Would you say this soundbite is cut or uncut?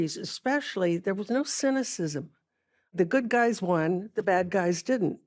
cut